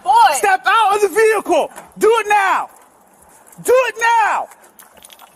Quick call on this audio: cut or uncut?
uncut